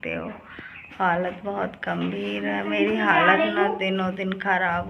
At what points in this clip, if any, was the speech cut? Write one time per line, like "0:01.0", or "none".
none